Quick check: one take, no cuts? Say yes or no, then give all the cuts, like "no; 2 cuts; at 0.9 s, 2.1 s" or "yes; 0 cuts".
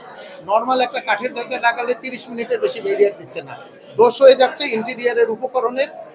yes; 0 cuts